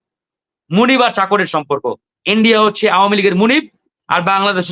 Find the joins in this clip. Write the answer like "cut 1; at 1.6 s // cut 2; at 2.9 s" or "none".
none